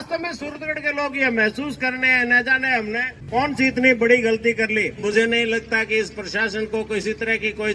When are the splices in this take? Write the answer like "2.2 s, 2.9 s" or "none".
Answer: 3.2 s, 5.0 s